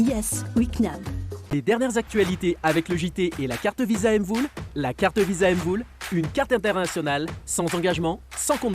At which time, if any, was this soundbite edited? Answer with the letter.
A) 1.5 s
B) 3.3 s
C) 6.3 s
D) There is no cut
A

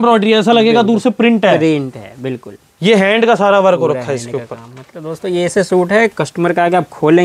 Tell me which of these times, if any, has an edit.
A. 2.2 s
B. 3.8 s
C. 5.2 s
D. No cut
D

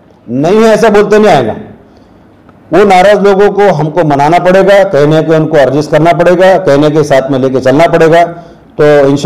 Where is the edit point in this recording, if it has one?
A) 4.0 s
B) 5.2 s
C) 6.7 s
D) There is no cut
D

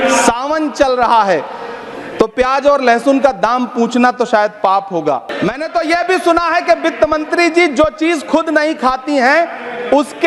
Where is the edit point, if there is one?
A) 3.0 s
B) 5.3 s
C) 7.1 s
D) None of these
B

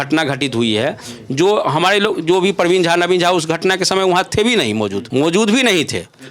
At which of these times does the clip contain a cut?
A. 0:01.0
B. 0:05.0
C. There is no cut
B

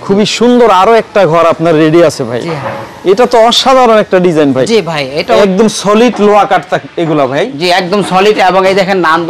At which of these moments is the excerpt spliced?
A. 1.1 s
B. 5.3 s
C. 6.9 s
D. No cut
B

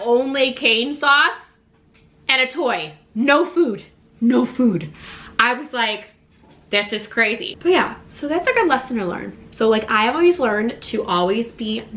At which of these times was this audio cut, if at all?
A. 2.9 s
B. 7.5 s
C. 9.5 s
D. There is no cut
B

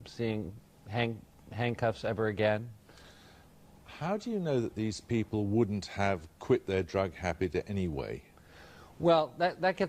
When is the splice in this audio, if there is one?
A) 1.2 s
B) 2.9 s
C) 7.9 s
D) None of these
B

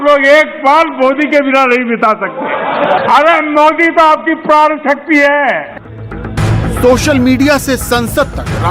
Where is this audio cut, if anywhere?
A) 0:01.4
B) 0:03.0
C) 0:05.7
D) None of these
D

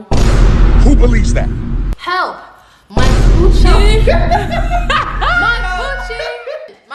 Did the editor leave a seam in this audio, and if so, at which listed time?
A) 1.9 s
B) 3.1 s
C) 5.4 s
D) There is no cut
A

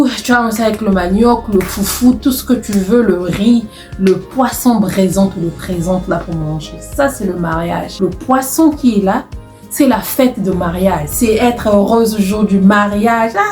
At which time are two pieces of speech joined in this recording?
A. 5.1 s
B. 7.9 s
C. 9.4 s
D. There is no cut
B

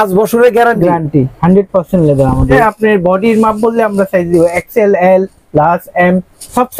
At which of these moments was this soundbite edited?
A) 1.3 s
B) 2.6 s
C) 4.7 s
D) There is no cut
B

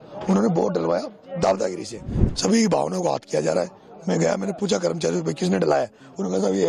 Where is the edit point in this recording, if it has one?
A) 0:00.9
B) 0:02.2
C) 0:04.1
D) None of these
B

